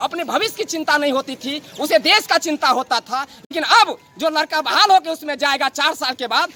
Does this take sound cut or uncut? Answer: uncut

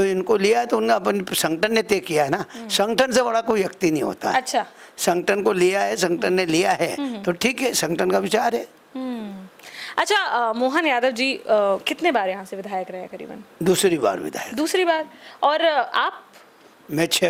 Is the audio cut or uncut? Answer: uncut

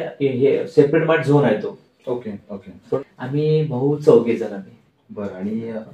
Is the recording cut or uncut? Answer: cut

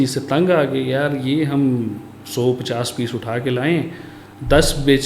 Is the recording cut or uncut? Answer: uncut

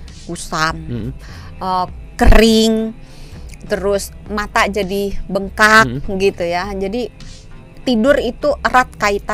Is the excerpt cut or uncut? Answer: uncut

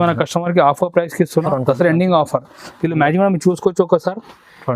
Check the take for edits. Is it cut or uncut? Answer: cut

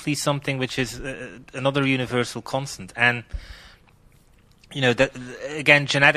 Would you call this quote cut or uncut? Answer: cut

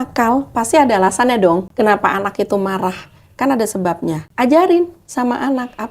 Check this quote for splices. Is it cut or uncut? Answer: cut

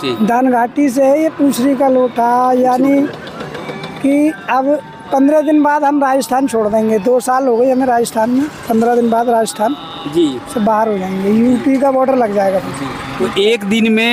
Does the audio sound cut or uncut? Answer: uncut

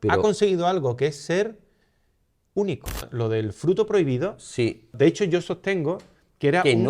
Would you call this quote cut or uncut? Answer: cut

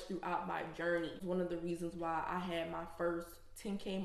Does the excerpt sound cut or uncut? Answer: cut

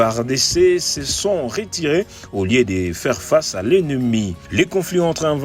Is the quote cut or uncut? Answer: cut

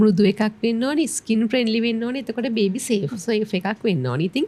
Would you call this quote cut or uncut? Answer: uncut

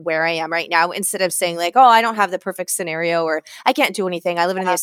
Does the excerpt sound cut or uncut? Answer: uncut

